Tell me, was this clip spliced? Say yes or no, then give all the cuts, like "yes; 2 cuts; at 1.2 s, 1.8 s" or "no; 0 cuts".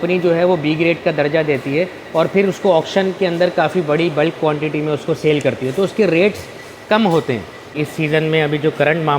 yes; 1 cut; at 7.7 s